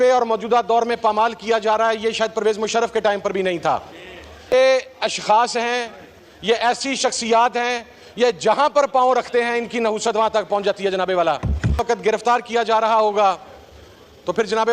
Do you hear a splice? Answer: yes; 2 cuts; at 4.3 s, 11.8 s

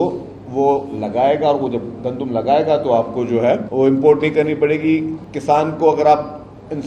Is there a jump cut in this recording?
yes; 2 cuts; at 3.7 s, 5.2 s

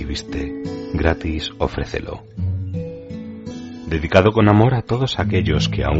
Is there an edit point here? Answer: yes; 2 cuts; at 2.2 s, 3.9 s

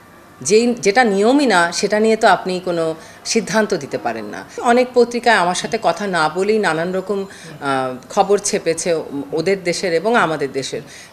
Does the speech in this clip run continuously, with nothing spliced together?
no; 1 cut; at 4.5 s

